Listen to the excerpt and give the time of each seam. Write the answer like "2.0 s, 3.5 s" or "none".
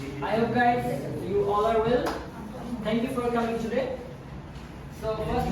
none